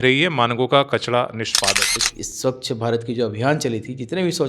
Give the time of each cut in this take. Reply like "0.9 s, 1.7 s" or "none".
1.9 s

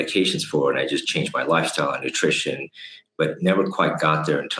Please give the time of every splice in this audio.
none

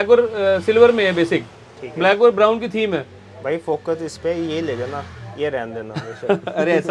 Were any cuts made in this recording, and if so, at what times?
none

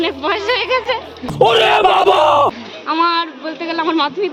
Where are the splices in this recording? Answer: none

